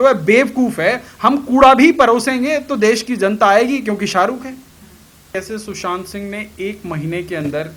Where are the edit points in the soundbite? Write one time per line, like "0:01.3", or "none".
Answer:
0:05.2